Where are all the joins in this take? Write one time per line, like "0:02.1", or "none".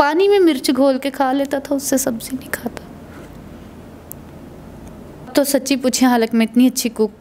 0:05.3